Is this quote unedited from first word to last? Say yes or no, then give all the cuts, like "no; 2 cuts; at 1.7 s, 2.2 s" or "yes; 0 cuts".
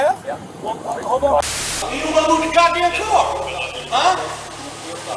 no; 1 cut; at 1.5 s